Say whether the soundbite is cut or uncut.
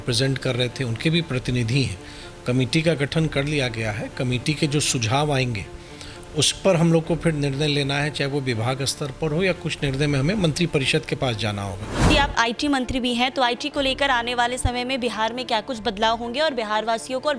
cut